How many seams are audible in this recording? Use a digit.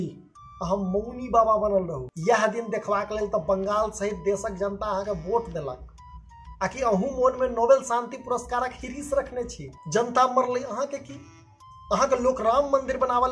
2